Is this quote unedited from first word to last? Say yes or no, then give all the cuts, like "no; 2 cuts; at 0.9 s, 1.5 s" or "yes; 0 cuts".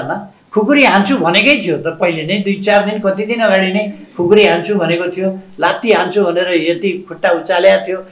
yes; 0 cuts